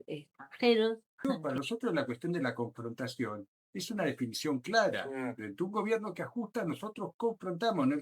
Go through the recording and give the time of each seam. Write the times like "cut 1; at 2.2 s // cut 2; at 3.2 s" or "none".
cut 1; at 1.4 s

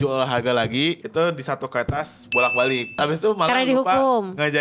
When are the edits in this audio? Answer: cut 1; at 1.0 s // cut 2; at 3.0 s

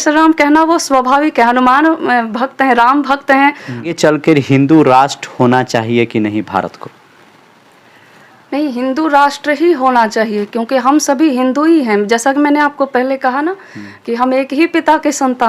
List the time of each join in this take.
cut 1; at 3.8 s

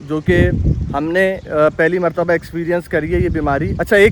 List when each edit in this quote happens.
none

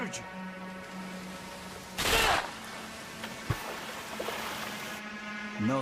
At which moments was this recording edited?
cut 1; at 1.1 s

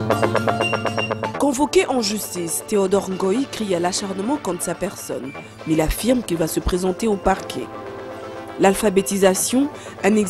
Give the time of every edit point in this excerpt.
cut 1; at 1.1 s

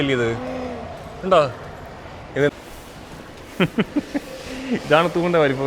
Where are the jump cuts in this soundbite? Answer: cut 1; at 2.5 s

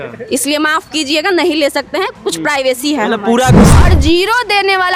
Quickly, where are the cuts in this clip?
cut 1; at 3.7 s

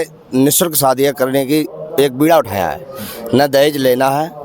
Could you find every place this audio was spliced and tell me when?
none

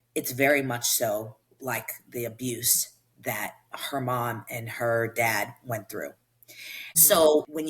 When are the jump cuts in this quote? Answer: cut 1; at 6.3 s

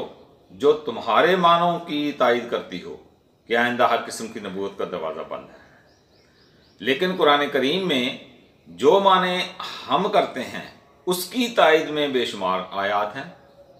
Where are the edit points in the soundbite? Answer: none

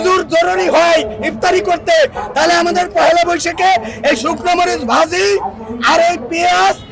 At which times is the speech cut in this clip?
none

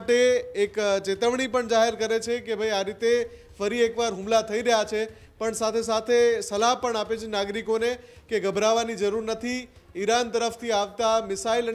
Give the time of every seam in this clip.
none

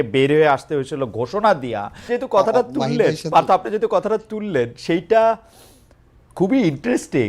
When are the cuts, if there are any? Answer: cut 1; at 2.0 s

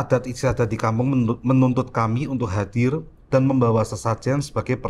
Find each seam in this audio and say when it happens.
none

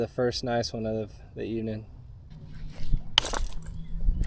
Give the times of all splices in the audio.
cut 1; at 2.3 s

